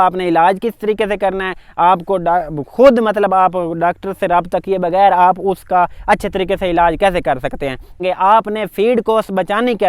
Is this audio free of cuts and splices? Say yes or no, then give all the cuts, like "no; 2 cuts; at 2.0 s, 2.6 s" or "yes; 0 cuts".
no; 1 cut; at 7.9 s